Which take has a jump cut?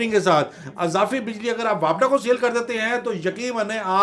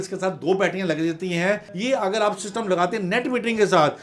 second; 1 cut; at 1.7 s

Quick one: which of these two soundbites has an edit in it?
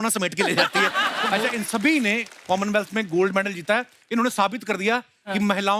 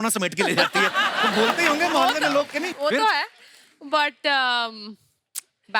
first; 1 cut; at 1.3 s

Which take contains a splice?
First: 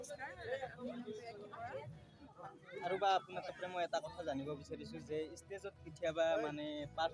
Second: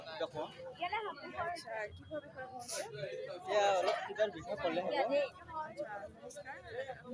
first; 1 cut; at 2.2 s

